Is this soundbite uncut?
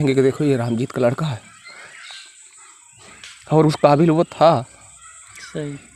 yes; 0 cuts

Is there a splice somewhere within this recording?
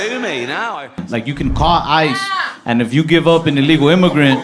yes; 1 cut; at 0.9 s

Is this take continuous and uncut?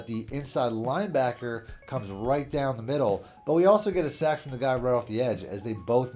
yes; 0 cuts

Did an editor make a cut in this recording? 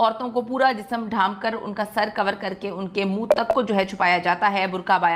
no; 0 cuts

